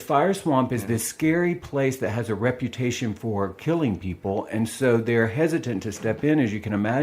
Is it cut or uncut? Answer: uncut